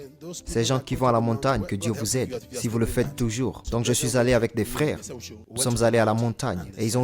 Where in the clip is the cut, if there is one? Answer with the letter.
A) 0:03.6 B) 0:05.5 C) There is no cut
A